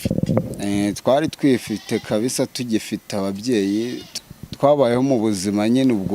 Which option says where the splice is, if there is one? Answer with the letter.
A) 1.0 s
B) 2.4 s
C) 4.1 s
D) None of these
C